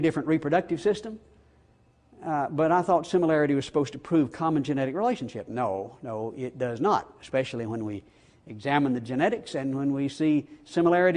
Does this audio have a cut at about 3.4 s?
yes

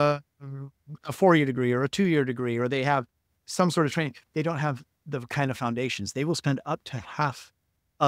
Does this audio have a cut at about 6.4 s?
no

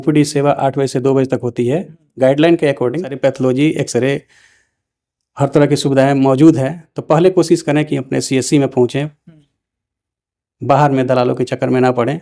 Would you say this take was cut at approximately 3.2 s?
yes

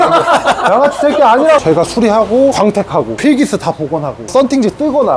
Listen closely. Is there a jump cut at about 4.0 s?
no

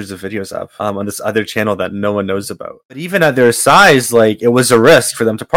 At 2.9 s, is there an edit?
yes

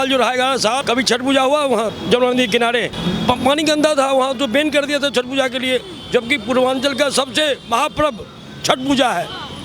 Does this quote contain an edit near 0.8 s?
yes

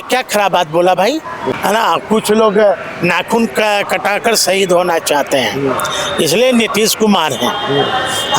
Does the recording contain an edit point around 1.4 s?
yes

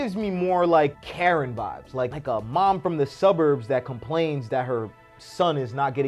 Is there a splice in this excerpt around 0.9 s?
yes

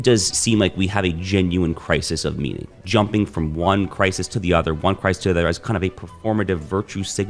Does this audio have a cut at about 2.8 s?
yes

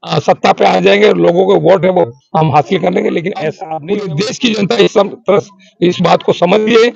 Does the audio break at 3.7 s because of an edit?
yes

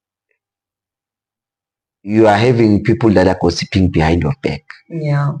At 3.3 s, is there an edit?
no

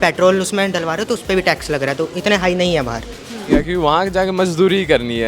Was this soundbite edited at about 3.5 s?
yes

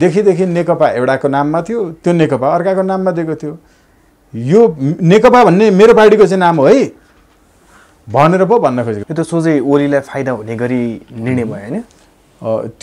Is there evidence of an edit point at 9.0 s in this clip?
yes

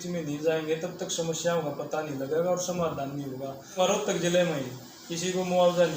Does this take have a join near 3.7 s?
yes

